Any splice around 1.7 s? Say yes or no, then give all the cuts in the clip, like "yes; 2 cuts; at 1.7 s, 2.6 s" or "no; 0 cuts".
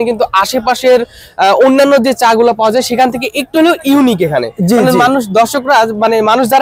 no; 0 cuts